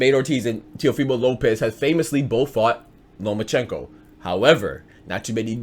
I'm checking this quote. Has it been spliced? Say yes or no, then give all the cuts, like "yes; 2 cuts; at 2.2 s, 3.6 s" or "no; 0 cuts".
no; 0 cuts